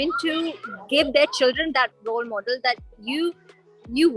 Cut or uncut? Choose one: uncut